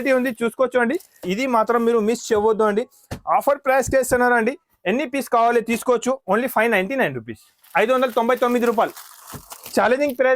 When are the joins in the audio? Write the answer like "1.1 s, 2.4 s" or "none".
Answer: 1.2 s